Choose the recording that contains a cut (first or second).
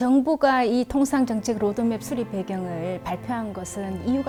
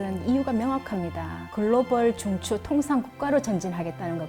second